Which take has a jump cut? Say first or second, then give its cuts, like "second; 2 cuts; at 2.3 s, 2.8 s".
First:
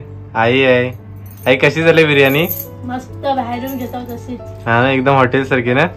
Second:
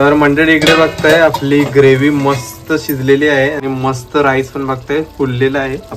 second; 1 cut; at 3.6 s